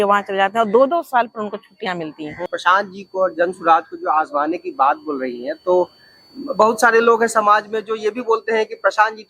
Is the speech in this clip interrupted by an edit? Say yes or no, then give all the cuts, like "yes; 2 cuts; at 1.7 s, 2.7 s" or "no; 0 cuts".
yes; 1 cut; at 2.5 s